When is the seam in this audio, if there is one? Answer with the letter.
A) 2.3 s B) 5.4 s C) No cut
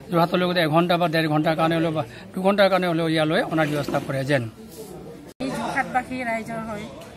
B